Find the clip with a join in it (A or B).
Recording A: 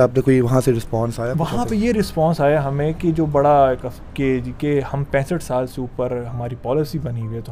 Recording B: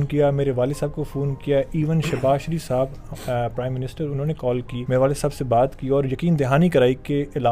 B